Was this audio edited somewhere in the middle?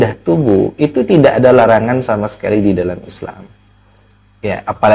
no; 0 cuts

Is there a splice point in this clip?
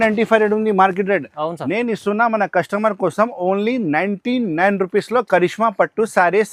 no; 0 cuts

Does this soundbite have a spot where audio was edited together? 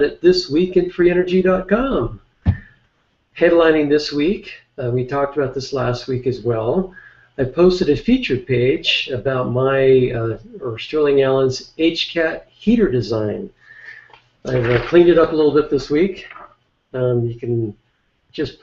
no; 0 cuts

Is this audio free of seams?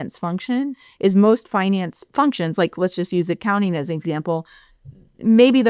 no; 1 cut; at 2.0 s

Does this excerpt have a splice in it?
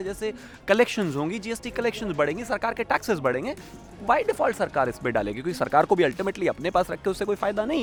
no; 0 cuts

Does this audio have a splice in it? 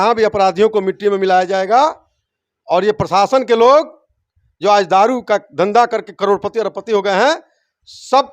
no; 0 cuts

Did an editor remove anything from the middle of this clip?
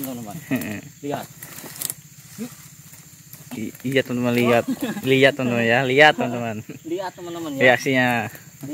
no; 0 cuts

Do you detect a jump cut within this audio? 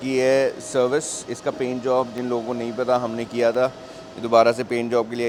no; 0 cuts

